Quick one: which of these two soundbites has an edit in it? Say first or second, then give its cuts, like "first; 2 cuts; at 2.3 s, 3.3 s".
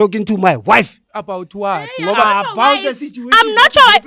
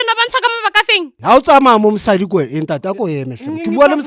second; 1 cut; at 1.2 s